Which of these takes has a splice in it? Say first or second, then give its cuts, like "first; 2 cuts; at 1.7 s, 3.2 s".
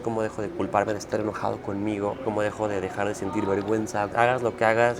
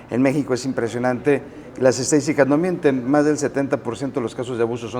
first; 2 cuts; at 2.2 s, 4.1 s